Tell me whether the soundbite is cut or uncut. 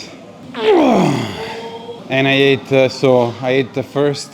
uncut